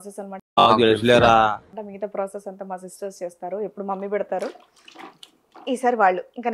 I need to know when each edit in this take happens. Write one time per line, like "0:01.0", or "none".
none